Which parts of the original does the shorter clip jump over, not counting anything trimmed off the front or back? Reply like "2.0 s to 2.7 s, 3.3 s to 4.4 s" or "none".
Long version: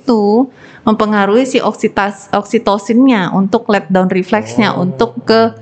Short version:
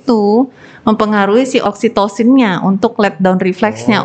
1.6 s to 2.3 s